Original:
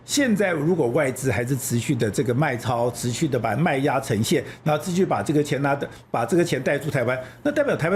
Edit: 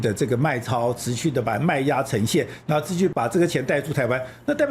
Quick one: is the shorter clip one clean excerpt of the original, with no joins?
no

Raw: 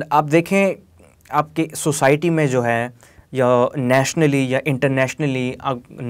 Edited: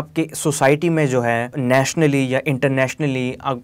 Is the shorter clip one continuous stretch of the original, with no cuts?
no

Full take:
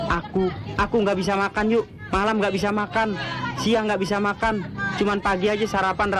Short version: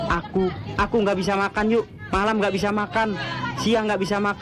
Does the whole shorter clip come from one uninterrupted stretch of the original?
yes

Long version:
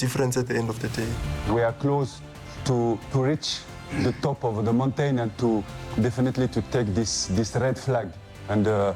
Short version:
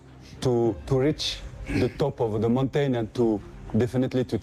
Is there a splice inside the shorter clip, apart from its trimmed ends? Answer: no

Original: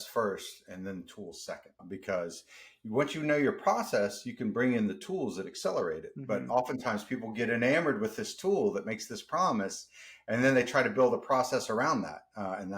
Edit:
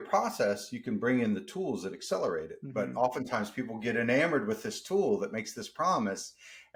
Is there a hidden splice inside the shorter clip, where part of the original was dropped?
no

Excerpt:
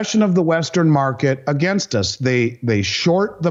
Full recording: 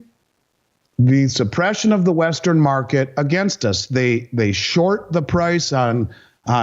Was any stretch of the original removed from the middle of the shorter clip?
no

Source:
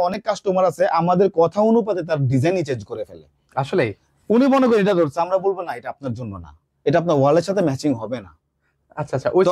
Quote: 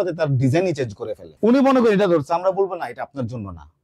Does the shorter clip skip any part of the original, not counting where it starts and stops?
yes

